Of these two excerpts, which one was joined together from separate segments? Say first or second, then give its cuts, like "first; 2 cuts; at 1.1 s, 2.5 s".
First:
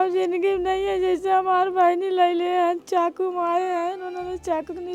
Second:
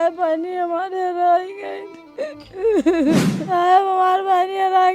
second; 1 cut; at 3.5 s